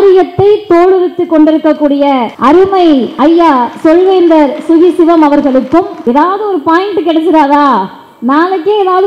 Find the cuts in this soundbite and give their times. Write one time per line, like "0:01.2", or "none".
0:02.3
0:03.1
0:05.9

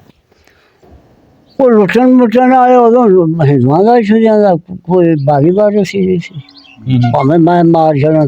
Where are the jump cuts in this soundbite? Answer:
none

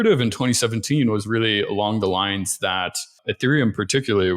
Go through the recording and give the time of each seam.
0:03.2

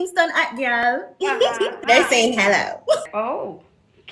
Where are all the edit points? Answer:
0:01.8
0:03.0

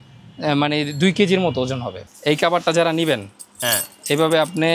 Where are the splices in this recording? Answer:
0:02.0

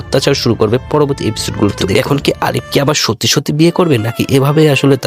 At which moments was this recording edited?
0:01.8

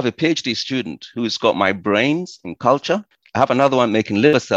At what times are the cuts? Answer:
0:03.1

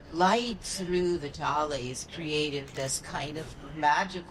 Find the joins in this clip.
none

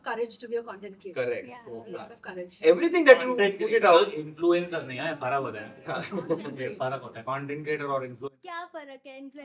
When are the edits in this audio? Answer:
none

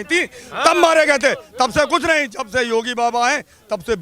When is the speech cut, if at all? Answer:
none

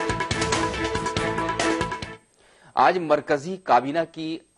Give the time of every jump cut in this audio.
none

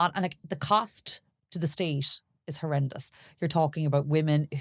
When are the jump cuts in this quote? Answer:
none

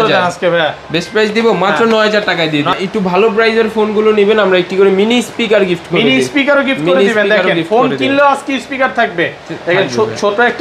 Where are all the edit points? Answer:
0:02.7

